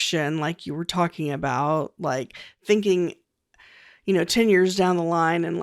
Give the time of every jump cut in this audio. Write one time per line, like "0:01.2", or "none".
0:02.6